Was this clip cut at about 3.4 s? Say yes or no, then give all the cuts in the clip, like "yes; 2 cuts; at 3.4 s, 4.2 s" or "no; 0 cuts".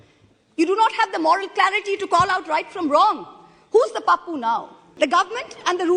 no; 1 cut; at 4.8 s